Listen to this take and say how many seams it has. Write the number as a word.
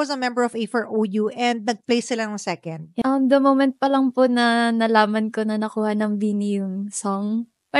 one